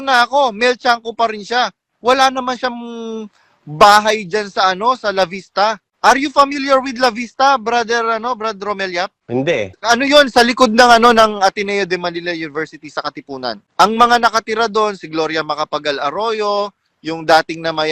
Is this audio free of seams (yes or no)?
no